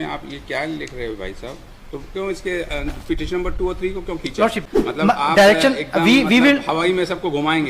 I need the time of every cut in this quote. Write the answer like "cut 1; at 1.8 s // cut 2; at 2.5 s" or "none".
cut 1; at 4.6 s